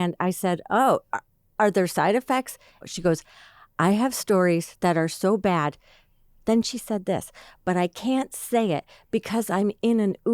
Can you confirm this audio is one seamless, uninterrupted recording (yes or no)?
no